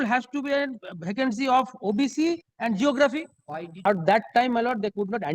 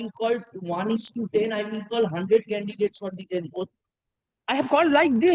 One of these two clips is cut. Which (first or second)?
first